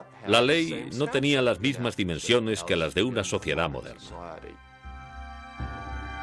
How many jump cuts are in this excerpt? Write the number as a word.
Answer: one